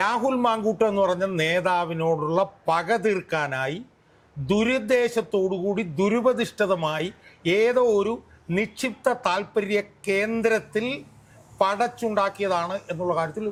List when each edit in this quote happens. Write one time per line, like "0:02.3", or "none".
none